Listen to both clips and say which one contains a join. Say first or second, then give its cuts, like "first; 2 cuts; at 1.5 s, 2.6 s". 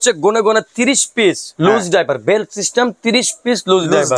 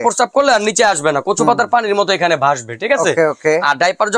first; 1 cut; at 1.5 s